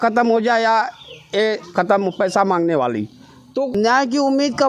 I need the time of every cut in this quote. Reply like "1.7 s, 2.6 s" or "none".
3.7 s